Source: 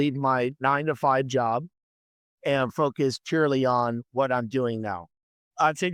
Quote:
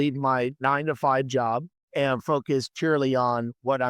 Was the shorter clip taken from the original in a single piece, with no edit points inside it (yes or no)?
no